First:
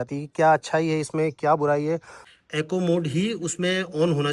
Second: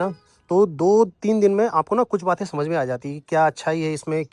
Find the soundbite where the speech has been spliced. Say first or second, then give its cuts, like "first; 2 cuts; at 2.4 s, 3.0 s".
first; 1 cut; at 2.3 s